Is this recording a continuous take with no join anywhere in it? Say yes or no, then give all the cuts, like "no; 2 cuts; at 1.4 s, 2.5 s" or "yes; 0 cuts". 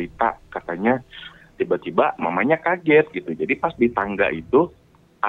no; 1 cut; at 1.3 s